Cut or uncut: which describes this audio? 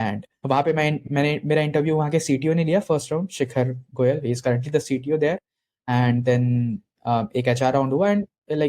cut